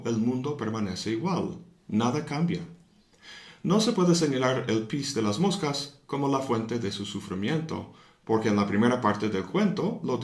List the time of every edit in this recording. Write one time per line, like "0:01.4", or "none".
none